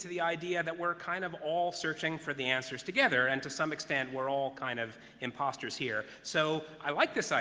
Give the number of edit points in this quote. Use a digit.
1